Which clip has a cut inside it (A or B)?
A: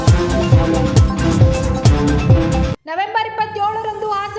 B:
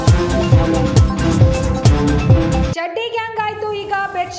B